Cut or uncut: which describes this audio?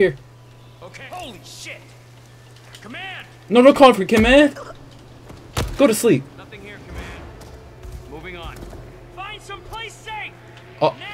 uncut